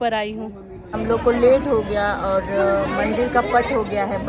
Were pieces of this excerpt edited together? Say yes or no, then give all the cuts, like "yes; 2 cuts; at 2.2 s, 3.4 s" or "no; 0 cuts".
yes; 1 cut; at 0.9 s